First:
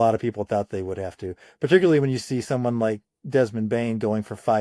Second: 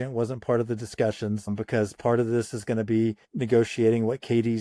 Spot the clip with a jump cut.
second; 2 cuts; at 1.5 s, 3.3 s

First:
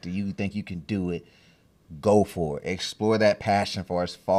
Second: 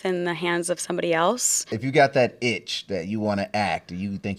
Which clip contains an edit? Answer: second; 1 cut; at 1.8 s

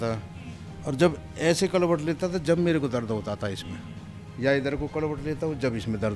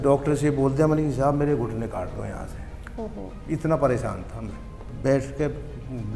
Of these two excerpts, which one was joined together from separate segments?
second; 1 cut; at 4.8 s

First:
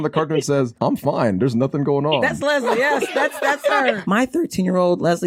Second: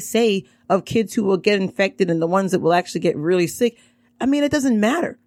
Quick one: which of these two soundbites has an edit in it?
first; 1 cut; at 4.0 s

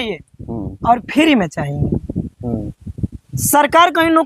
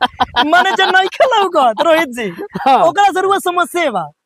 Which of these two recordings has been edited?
first; 1 cut; at 2.7 s

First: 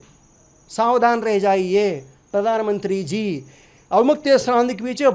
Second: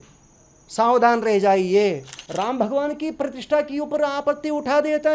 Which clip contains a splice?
second; 1 cut; at 2.2 s

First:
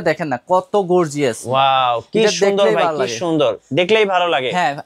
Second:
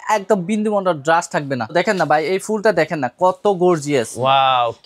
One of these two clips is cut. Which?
second; 1 cut; at 1.7 s

